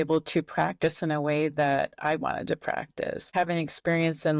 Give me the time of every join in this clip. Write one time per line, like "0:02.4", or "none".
0:03.3